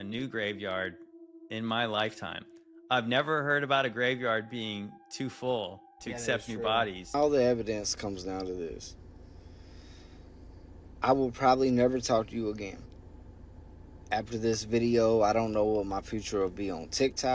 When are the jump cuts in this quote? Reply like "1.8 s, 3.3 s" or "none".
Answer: 7.0 s